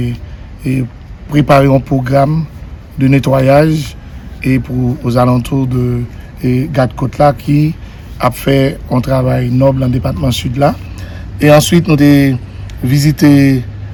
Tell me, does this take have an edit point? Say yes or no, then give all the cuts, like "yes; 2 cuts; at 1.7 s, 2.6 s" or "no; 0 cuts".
no; 0 cuts